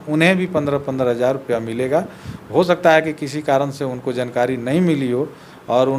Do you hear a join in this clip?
no; 0 cuts

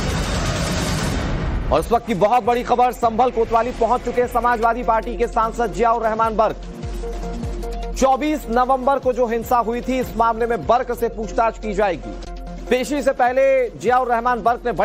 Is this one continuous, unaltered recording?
no; 1 cut; at 10.8 s

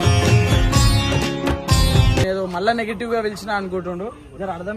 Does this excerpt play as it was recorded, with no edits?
no; 1 cut; at 2.2 s

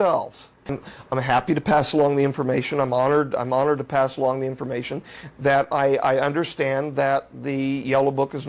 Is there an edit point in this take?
yes; 1 cut; at 0.9 s

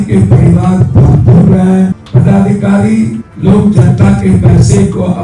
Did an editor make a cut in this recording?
yes; 2 cuts; at 2.0 s, 3.2 s

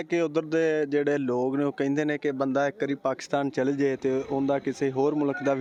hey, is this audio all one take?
yes; 0 cuts

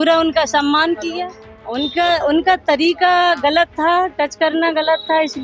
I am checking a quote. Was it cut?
yes; 1 cut; at 1.8 s

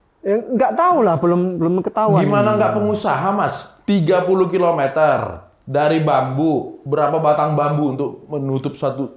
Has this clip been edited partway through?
no; 0 cuts

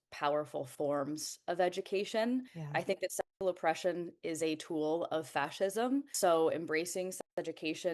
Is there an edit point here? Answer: yes; 2 cuts; at 2.6 s, 6.1 s

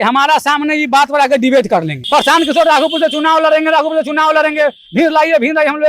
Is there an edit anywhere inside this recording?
yes; 1 cut; at 2.0 s

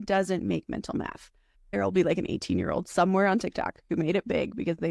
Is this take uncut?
no; 1 cut; at 1.7 s

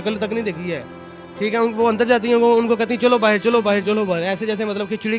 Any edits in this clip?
no; 0 cuts

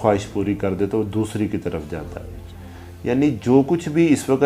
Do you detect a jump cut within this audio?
no; 0 cuts

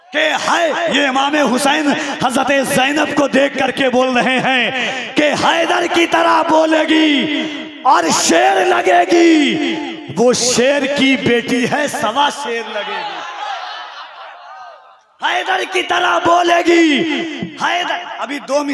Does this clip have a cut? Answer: no; 0 cuts

